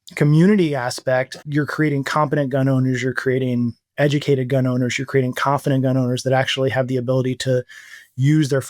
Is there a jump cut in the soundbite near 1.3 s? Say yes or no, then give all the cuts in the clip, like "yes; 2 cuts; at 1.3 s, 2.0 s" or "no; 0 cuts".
yes; 1 cut; at 1.3 s